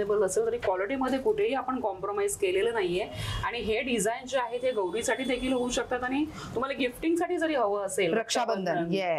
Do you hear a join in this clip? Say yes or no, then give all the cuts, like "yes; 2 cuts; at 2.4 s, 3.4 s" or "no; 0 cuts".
no; 0 cuts